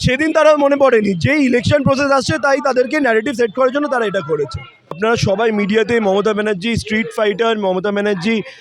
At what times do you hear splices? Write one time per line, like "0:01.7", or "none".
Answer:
0:05.0